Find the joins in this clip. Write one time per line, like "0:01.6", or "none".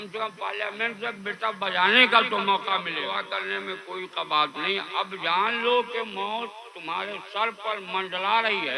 0:02.9